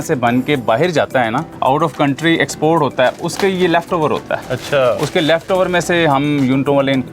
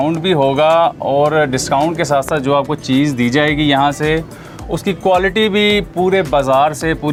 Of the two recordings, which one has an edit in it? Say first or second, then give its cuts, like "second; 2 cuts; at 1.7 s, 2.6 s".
first; 1 cut; at 1.5 s